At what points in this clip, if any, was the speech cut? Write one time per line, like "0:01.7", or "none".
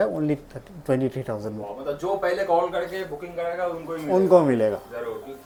none